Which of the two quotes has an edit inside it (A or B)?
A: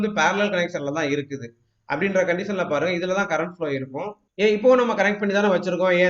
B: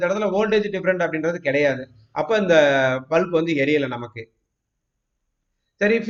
A